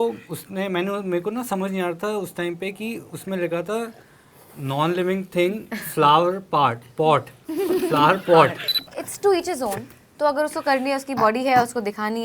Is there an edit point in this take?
yes; 1 cut; at 8.7 s

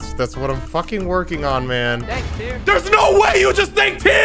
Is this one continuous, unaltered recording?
no; 1 cut; at 2.0 s

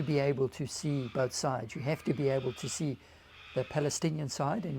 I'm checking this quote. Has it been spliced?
no; 0 cuts

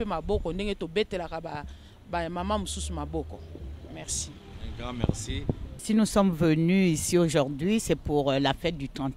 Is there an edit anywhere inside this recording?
yes; 1 cut; at 5.8 s

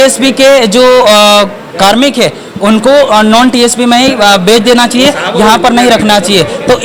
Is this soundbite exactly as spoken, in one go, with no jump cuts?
yes; 0 cuts

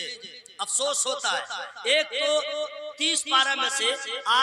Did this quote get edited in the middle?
no; 0 cuts

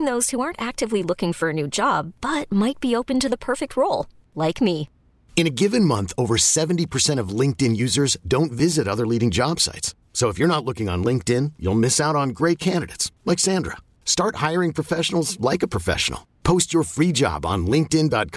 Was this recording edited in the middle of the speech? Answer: no; 0 cuts

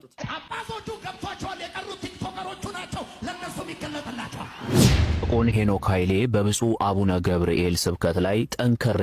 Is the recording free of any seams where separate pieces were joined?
no; 1 cut; at 5.0 s

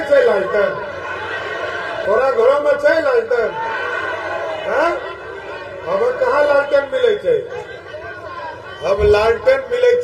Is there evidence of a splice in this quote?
yes; 1 cut; at 2.0 s

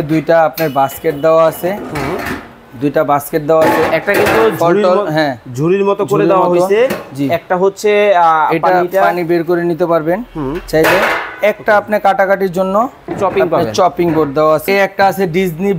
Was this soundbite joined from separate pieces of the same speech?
yes; 1 cut; at 14.7 s

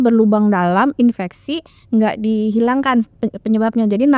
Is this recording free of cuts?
yes; 0 cuts

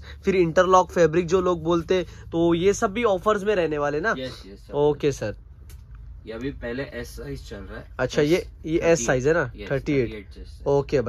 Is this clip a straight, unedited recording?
yes; 0 cuts

